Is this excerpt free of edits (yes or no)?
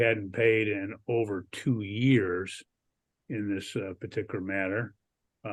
yes